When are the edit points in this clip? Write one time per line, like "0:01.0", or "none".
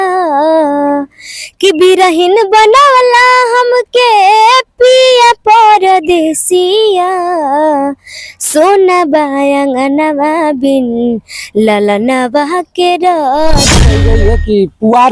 0:13.9